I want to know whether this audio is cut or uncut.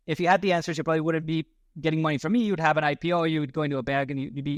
uncut